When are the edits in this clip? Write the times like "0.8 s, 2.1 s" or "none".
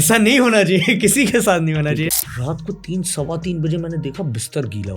2.2 s